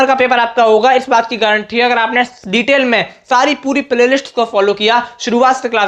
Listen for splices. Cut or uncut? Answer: uncut